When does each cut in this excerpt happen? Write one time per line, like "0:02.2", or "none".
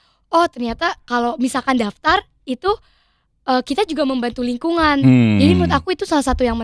none